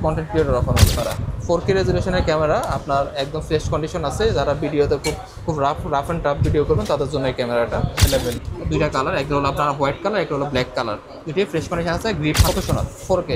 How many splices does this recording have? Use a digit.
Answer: 3